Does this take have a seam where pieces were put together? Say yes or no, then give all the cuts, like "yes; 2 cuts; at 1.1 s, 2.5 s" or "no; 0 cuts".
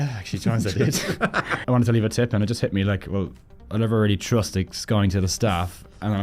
yes; 1 cut; at 1.5 s